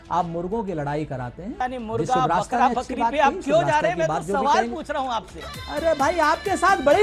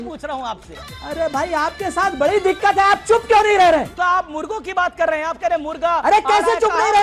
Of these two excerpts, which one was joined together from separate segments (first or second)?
first